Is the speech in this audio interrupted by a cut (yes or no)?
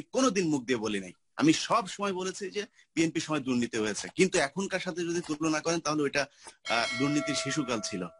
no